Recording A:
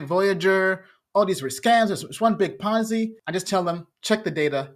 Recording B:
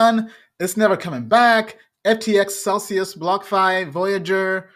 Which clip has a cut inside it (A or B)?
A